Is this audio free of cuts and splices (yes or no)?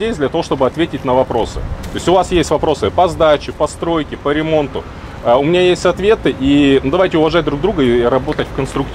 yes